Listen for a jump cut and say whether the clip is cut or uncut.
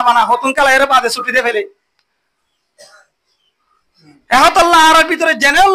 uncut